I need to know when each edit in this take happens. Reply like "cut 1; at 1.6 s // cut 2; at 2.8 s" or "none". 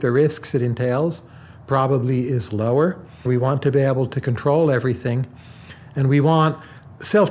cut 1; at 3.2 s